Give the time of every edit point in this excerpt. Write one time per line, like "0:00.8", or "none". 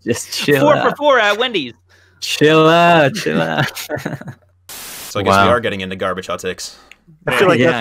0:05.0